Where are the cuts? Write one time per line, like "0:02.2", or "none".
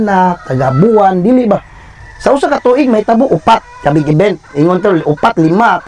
none